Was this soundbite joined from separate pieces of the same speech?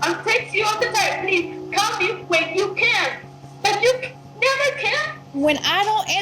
yes; 1 cut; at 3.3 s

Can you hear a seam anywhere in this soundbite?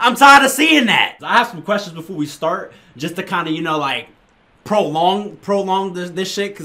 yes; 1 cut; at 1.2 s

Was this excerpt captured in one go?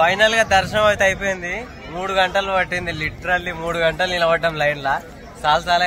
yes; 0 cuts

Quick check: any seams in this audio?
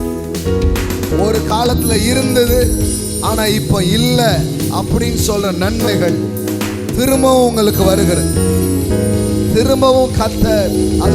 no; 0 cuts

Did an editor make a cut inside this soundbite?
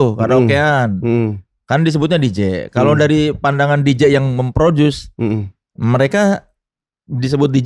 no; 0 cuts

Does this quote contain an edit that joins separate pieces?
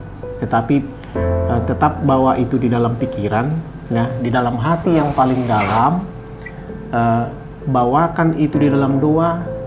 no; 0 cuts

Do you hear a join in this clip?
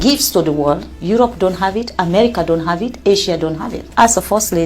yes; 2 cuts; at 0.9 s, 3.9 s

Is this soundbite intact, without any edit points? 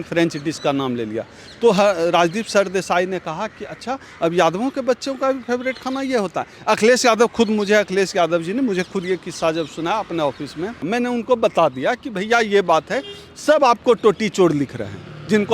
no; 1 cut; at 10.8 s

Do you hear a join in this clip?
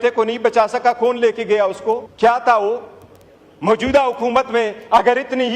yes; 1 cut; at 2.1 s

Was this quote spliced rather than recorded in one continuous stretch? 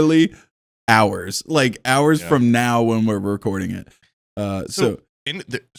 no; 0 cuts

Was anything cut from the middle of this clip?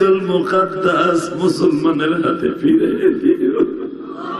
no; 0 cuts

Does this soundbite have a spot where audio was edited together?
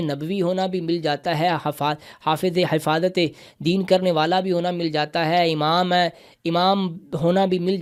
no; 0 cuts

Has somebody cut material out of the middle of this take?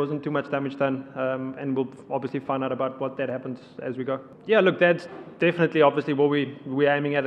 yes; 1 cut; at 4.3 s

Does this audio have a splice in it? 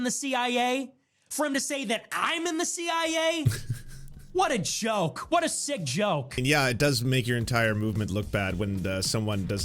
yes; 1 cut; at 6.4 s

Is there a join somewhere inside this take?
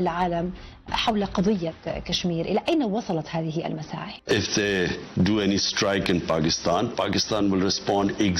yes; 1 cut; at 4.1 s

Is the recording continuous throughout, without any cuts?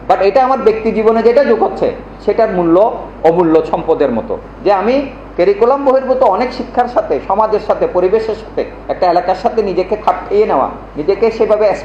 yes; 0 cuts

